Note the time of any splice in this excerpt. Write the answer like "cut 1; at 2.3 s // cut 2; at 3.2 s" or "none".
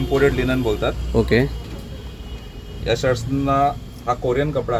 none